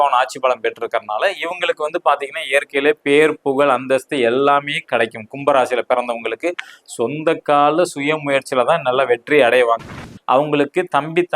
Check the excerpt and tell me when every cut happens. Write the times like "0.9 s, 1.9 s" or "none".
10.1 s